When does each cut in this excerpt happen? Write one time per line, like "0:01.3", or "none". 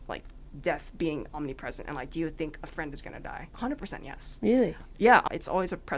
0:03.5
0:05.2